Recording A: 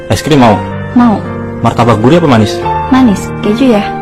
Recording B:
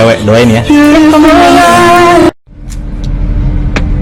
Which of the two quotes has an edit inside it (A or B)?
B